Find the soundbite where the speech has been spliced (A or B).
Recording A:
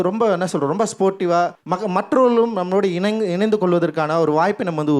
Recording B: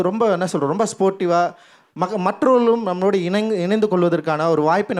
A